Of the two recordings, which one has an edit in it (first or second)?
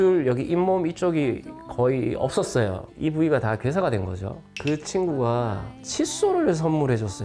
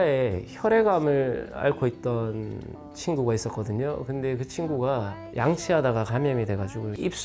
first